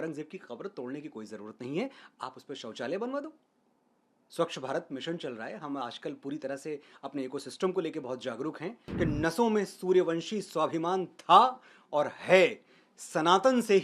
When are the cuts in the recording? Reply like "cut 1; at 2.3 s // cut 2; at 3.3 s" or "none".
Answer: cut 1; at 8.8 s